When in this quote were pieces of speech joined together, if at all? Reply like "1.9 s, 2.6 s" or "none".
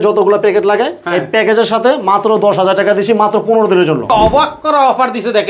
4.1 s